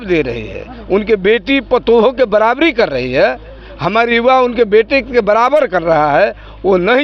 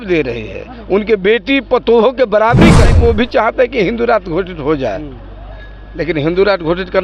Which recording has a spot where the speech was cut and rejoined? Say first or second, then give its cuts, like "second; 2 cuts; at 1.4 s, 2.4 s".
second; 1 cut; at 2.9 s